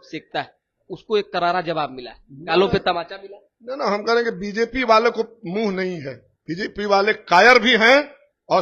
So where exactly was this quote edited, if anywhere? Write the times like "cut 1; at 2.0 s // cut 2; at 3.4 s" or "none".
none

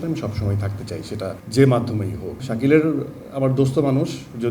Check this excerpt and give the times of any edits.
cut 1; at 2.3 s

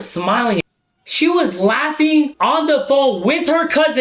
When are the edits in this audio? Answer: cut 1; at 1.0 s // cut 2; at 2.3 s

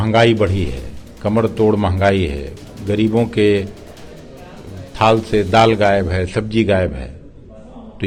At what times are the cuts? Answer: none

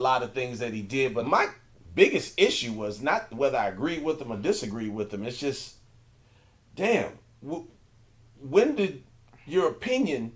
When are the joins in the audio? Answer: cut 1; at 1.2 s

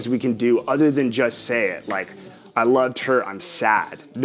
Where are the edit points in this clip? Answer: none

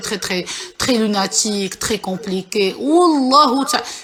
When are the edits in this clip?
none

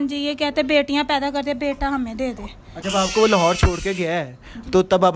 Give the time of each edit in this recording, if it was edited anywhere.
cut 1; at 2.7 s

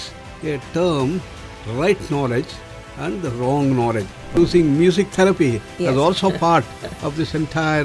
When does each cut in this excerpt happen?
cut 1; at 4.4 s

